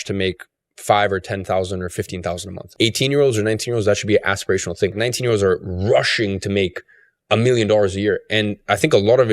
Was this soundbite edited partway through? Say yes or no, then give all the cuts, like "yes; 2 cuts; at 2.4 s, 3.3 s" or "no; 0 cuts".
yes; 2 cuts; at 2.7 s, 5.0 s